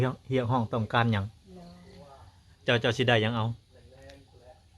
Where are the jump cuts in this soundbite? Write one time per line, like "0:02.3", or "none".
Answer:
0:02.5